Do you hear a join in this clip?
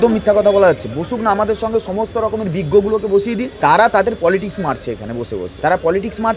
yes; 2 cuts; at 3.5 s, 5.5 s

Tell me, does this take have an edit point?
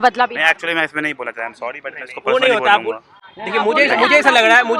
no; 0 cuts

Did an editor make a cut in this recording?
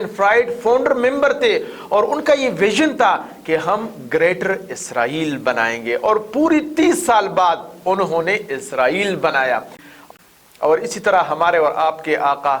yes; 1 cut; at 9.9 s

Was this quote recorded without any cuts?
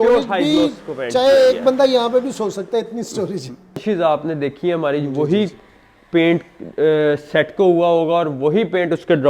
no; 1 cut; at 3.8 s

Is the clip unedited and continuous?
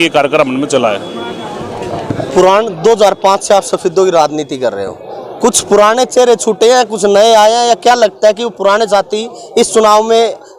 yes; 0 cuts

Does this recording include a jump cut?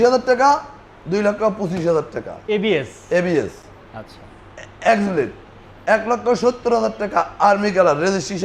no; 0 cuts

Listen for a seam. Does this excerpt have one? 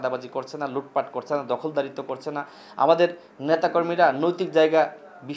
no; 0 cuts

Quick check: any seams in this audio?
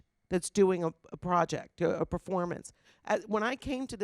yes; 1 cut; at 2.9 s

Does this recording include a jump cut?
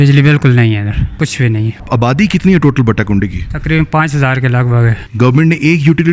yes; 2 cuts; at 1.7 s, 5.0 s

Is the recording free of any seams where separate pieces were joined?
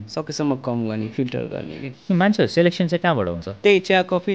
no; 2 cuts; at 2.0 s, 3.4 s

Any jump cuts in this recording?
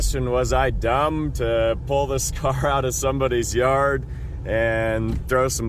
no; 0 cuts

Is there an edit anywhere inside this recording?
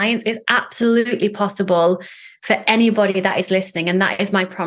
no; 0 cuts

